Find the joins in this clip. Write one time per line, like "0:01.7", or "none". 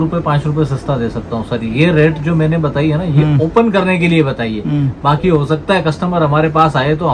none